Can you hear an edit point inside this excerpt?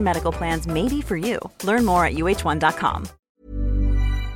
yes; 1 cut; at 3.3 s

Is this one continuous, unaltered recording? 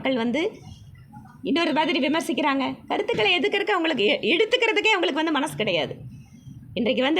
yes; 0 cuts

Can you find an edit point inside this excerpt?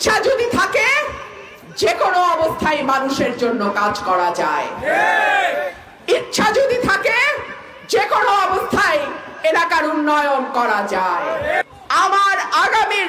yes; 1 cut; at 11.6 s

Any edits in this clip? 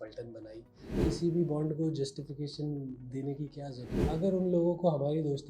yes; 2 cuts; at 1.0 s, 3.9 s

